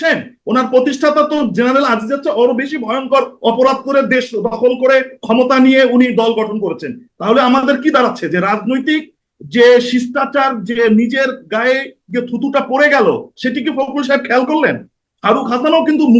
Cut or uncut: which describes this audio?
cut